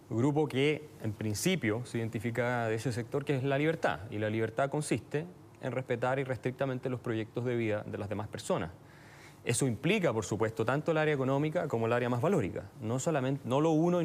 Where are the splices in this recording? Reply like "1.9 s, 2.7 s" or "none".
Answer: 2.7 s